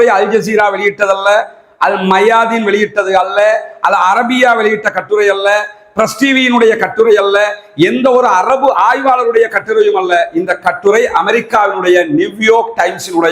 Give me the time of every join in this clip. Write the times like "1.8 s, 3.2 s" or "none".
none